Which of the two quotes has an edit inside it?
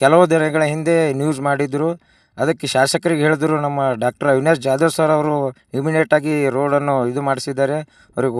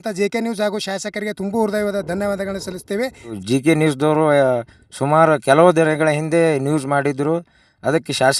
second; 1 cut; at 3.4 s

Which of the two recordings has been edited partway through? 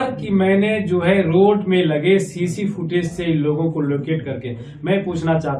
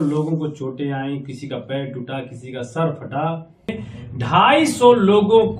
second; 1 cut; at 3.8 s

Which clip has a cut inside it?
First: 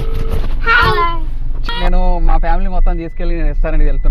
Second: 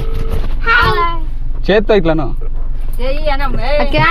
first; 1 cut; at 1.6 s

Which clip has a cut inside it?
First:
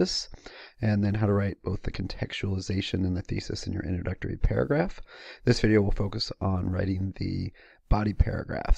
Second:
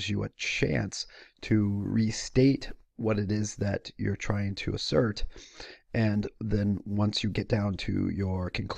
second; 1 cut; at 7.5 s

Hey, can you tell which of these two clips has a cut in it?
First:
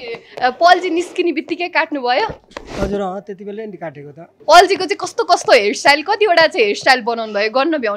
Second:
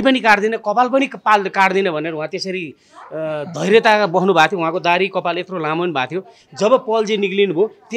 first; 1 cut; at 4.3 s

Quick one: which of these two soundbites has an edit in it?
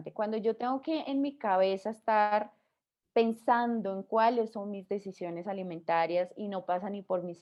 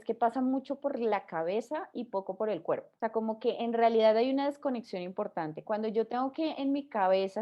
second; 1 cut; at 2.9 s

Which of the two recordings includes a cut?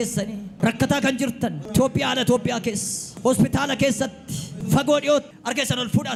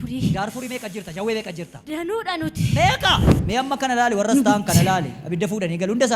second; 2 cuts; at 1.8 s, 3.3 s

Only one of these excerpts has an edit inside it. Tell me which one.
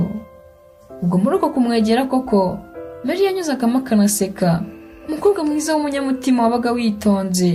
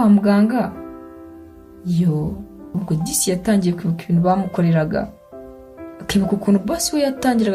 second; 1 cut; at 2.7 s

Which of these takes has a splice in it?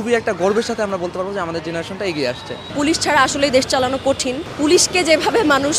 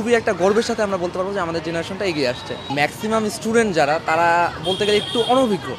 first; 2 cuts; at 2.7 s, 4.5 s

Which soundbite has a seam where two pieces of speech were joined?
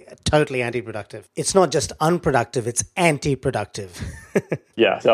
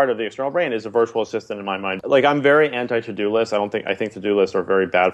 second; 1 cut; at 2.0 s

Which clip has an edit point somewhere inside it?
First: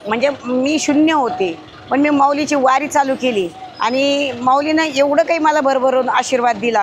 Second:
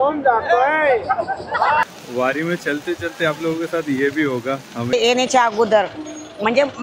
second; 2 cuts; at 1.9 s, 4.9 s

